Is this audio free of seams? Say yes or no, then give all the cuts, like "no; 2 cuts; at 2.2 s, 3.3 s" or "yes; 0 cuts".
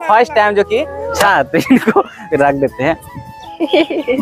no; 1 cut; at 1.2 s